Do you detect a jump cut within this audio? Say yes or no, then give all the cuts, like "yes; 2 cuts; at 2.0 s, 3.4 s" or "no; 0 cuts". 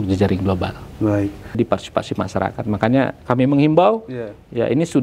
yes; 1 cut; at 1.6 s